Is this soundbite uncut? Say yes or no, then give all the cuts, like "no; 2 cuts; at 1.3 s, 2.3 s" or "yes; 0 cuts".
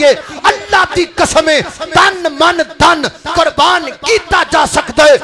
yes; 0 cuts